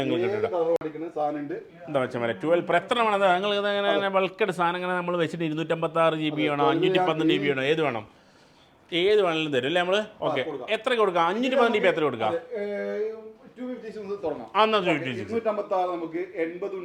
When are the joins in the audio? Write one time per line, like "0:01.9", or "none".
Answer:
none